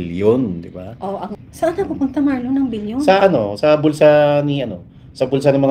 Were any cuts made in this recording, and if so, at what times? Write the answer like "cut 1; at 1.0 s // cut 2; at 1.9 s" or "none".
cut 1; at 1.3 s